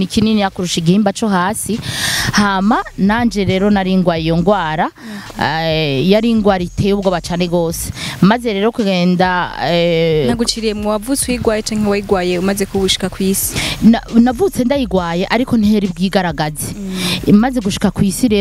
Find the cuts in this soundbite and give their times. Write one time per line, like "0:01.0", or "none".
none